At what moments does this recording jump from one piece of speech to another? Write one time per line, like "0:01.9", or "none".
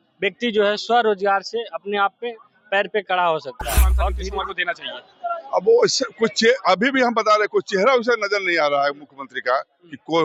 0:04.1